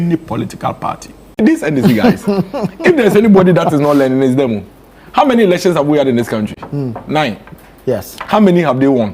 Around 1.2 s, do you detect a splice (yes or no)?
yes